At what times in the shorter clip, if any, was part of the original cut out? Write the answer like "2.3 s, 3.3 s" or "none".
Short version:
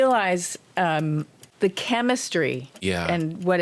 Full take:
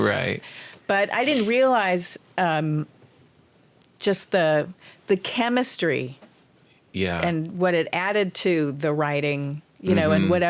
1.4 s, 2.7 s

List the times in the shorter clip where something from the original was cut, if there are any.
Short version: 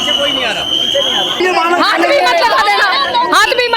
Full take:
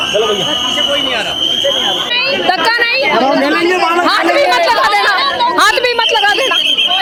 1.4 s

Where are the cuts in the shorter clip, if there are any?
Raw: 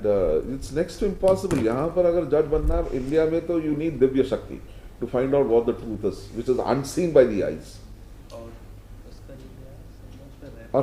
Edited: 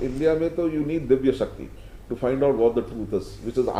none

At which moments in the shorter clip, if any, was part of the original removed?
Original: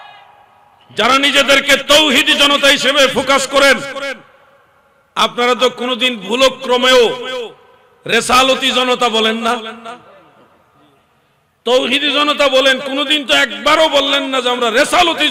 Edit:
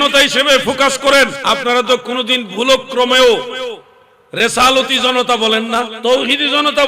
1.4 s, 5.9 s

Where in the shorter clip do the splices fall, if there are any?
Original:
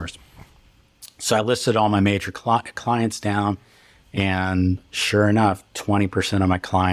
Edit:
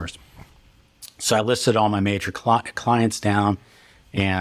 none

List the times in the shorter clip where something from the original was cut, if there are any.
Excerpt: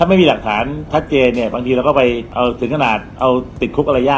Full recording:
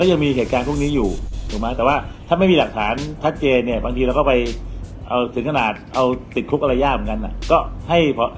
2.3 s

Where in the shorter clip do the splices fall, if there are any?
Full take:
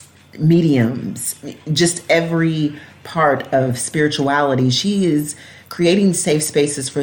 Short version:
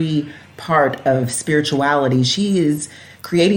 none

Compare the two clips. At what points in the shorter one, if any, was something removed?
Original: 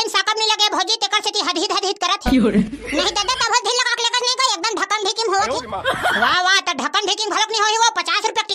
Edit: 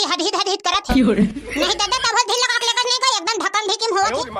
none

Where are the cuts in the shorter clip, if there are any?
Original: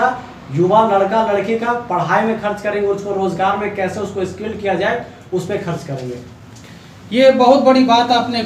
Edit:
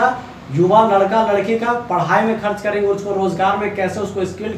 none

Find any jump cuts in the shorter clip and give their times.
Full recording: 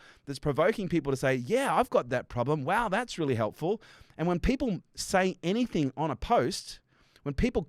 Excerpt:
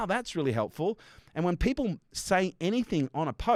none

